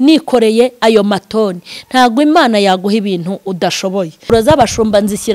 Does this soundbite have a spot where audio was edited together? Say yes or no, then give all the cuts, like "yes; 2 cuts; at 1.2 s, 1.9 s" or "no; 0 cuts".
yes; 1 cut; at 4.3 s